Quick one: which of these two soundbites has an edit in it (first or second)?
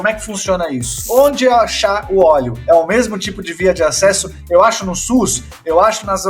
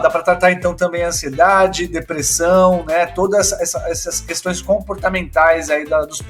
first